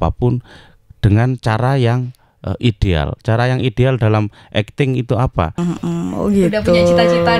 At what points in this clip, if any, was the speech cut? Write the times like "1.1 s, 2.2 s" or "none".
5.6 s